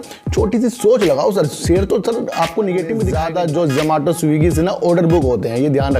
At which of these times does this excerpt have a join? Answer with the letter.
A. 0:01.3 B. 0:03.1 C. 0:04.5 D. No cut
B